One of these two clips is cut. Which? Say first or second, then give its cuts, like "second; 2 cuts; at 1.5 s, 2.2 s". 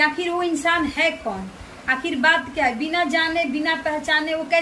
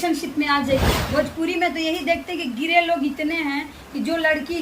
second; 1 cut; at 1.0 s